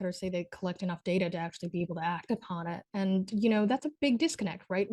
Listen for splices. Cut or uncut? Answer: uncut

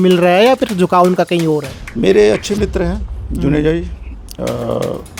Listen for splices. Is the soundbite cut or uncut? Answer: cut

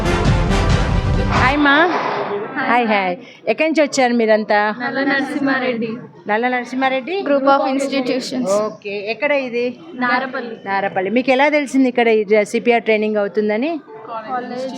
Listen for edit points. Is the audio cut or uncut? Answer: cut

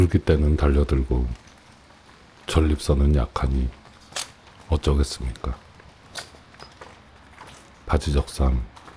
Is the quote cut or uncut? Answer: uncut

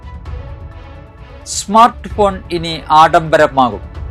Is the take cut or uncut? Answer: cut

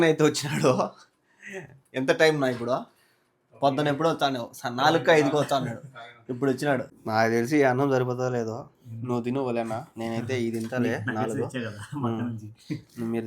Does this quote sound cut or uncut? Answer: cut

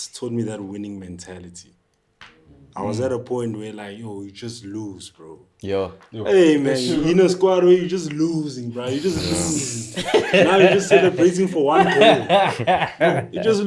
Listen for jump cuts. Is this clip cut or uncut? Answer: uncut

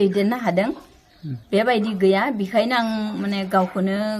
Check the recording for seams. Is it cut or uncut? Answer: uncut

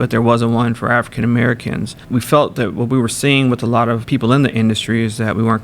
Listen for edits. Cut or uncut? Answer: cut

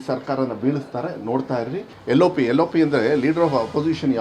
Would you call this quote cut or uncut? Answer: cut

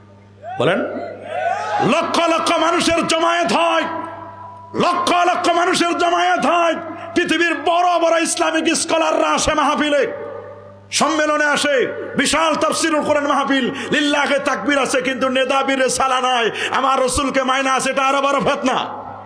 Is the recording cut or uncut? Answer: uncut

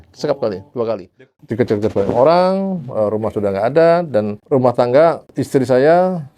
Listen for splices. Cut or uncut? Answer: cut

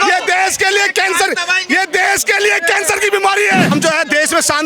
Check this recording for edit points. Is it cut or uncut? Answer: cut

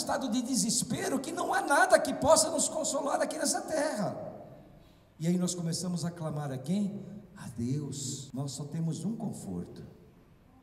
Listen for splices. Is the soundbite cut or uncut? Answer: cut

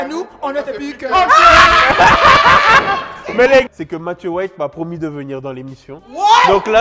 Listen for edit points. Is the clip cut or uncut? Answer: cut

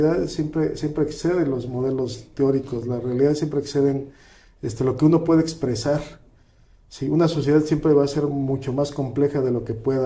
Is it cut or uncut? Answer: uncut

